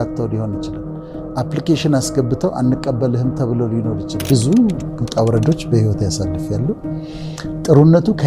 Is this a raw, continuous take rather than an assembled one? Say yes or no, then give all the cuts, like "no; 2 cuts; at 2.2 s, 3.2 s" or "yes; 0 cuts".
no; 1 cut; at 4.3 s